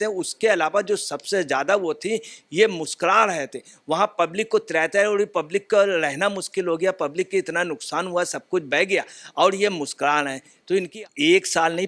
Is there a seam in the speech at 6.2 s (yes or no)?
no